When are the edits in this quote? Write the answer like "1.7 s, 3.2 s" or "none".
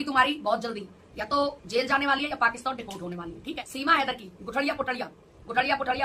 3.6 s